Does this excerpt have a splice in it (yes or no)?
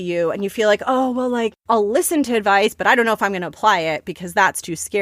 yes